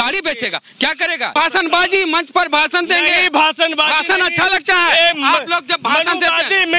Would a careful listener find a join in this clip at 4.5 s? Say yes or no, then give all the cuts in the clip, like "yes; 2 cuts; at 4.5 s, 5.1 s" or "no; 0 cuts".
no; 1 cut; at 1.3 s